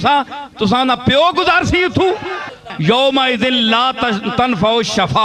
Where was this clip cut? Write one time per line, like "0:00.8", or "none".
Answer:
0:02.7